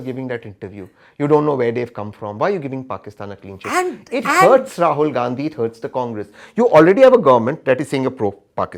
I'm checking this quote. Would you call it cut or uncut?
uncut